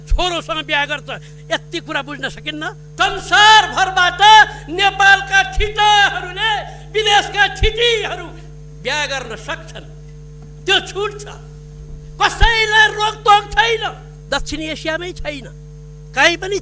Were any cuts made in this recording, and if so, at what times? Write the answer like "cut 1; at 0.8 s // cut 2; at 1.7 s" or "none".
cut 1; at 2.8 s // cut 2; at 14.1 s